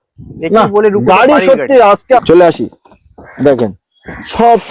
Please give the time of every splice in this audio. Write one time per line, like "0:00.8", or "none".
0:02.2